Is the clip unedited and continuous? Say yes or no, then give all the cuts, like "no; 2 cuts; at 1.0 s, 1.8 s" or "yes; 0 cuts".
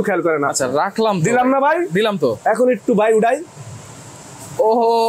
yes; 0 cuts